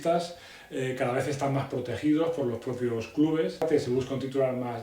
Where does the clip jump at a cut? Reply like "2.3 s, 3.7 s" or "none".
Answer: 3.6 s